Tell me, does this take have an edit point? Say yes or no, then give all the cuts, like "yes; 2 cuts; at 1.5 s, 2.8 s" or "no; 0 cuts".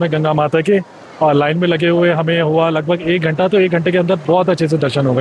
no; 0 cuts